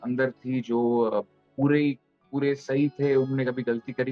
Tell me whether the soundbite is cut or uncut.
uncut